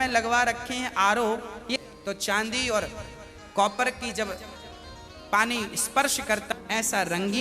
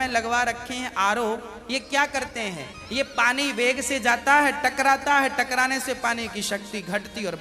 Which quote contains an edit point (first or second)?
first